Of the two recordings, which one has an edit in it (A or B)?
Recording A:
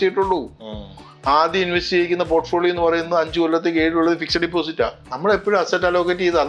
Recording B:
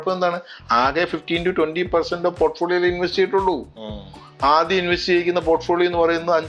A